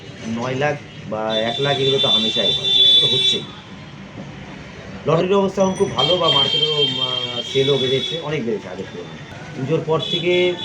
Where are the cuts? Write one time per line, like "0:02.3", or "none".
none